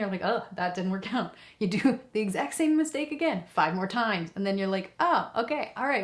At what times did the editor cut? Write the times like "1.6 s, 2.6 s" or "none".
none